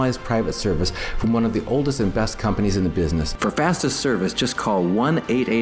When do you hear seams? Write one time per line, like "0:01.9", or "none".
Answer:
0:03.3